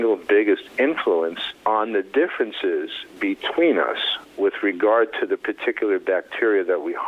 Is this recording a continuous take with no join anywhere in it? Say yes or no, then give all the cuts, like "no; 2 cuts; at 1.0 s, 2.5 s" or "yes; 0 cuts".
no; 1 cut; at 1.5 s